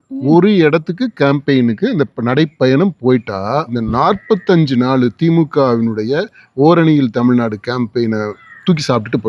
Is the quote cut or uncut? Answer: cut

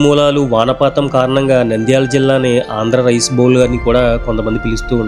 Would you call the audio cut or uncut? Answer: uncut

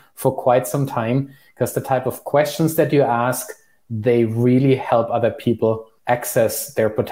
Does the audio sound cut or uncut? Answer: cut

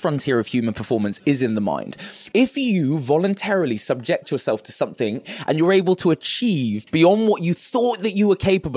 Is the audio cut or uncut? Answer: cut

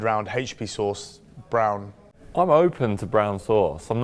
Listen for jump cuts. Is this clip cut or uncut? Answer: cut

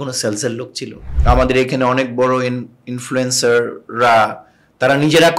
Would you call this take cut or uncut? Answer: cut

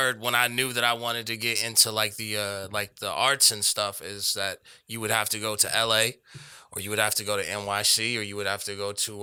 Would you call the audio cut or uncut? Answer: uncut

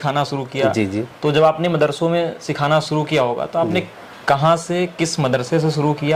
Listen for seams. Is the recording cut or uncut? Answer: uncut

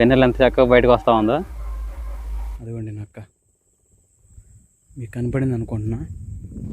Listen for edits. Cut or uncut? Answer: cut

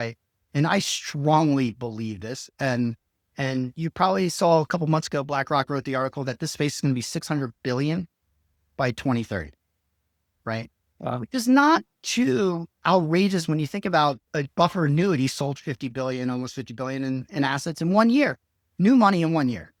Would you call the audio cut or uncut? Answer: uncut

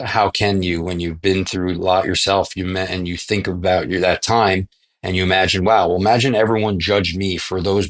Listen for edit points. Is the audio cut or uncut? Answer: uncut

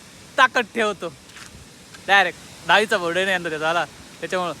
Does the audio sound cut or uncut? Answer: uncut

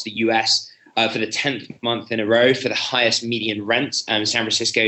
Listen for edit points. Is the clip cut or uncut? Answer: uncut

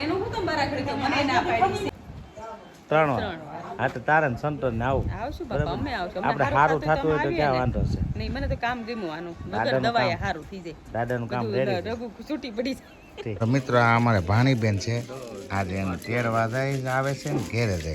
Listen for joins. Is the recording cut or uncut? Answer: cut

